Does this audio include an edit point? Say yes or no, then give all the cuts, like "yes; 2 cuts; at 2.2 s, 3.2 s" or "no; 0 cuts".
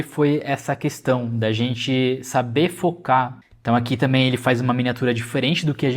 yes; 1 cut; at 3.4 s